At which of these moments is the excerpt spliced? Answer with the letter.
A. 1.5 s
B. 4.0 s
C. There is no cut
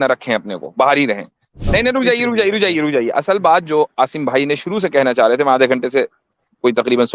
A